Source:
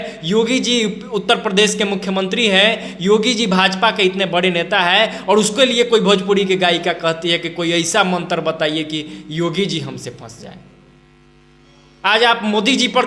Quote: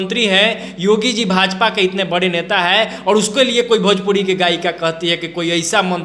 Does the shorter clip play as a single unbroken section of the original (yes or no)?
yes